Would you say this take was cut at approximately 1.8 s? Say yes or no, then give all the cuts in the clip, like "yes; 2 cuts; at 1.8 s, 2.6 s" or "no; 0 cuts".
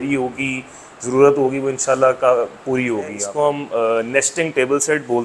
no; 1 cut; at 3.2 s